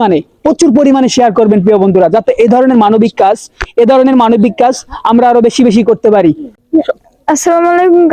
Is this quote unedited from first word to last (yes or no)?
no